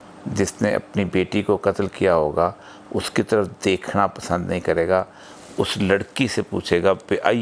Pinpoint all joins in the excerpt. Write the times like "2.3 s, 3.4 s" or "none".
none